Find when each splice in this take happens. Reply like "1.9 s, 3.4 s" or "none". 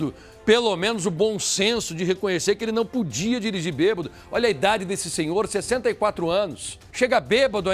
6.8 s